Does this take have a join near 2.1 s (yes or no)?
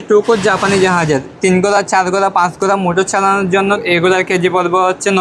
no